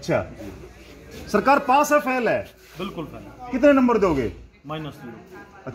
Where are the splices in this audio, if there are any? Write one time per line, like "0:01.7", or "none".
none

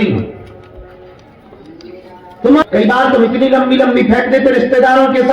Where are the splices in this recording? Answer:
0:02.6

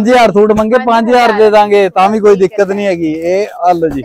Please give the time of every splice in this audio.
none

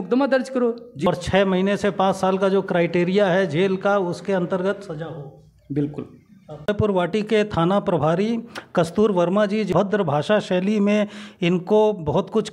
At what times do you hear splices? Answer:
0:01.1
0:06.7
0:09.7

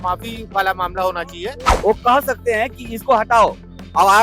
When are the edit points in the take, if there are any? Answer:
0:01.7

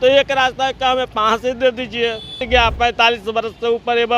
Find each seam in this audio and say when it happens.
0:02.3

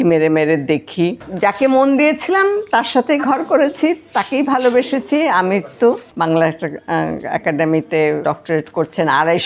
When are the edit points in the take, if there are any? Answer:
0:01.2
0:06.1

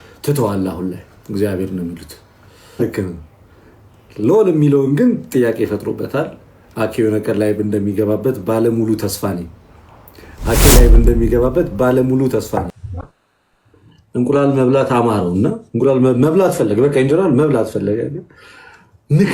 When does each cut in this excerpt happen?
0:12.7

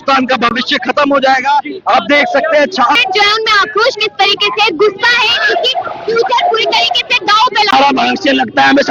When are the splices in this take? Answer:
0:03.0
0:07.7

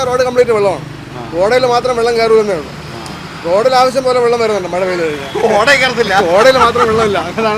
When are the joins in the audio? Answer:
none

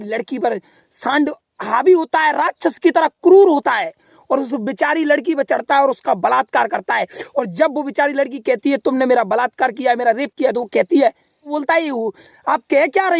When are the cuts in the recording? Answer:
none

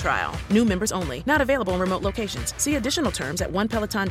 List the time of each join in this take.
none

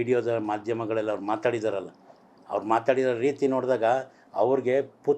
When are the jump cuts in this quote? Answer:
none

